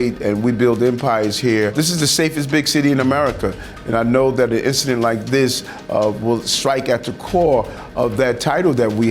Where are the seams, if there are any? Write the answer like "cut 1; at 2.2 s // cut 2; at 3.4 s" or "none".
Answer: cut 1; at 1.7 s